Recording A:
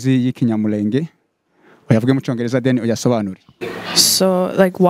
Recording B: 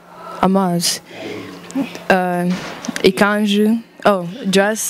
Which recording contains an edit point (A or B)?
A